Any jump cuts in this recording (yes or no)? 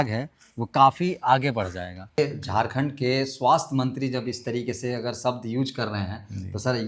yes